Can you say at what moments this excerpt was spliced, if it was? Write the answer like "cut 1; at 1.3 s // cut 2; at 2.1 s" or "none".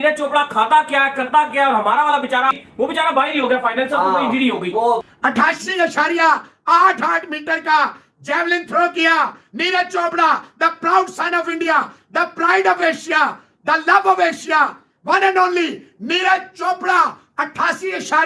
cut 1; at 5.1 s